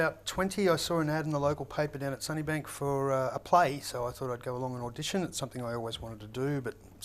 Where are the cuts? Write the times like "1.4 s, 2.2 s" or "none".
none